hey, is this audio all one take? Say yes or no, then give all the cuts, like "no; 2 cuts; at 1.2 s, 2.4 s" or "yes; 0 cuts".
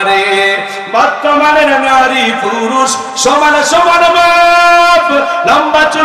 yes; 0 cuts